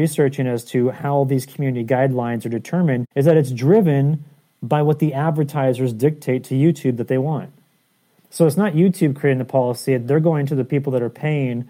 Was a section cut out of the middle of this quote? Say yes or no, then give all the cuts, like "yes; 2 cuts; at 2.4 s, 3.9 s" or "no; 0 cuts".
no; 0 cuts